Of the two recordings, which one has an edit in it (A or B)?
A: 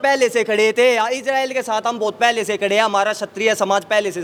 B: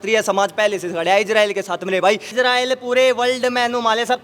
B